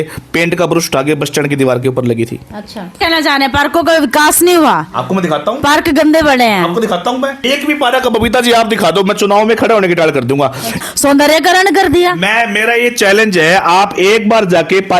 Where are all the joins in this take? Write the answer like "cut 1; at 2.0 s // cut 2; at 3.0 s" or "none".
cut 1; at 3.0 s // cut 2; at 7.5 s // cut 3; at 10.8 s